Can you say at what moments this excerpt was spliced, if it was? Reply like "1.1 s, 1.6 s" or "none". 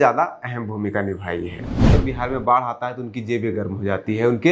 1.9 s